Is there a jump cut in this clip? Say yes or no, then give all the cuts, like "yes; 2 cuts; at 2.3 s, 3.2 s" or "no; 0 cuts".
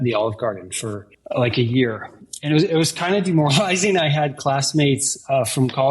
no; 0 cuts